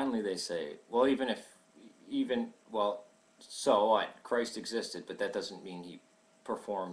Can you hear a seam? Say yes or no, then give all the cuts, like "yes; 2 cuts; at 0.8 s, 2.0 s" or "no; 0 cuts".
yes; 1 cut; at 4.2 s